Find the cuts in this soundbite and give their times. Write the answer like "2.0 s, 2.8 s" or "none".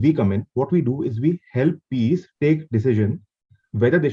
none